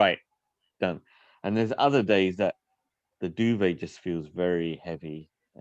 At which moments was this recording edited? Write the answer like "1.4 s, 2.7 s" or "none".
none